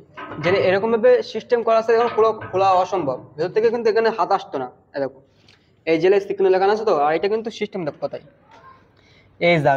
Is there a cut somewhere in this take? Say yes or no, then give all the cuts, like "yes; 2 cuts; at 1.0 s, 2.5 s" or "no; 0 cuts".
no; 0 cuts